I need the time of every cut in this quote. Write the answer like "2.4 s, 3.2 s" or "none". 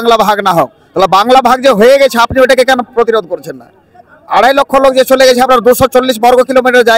none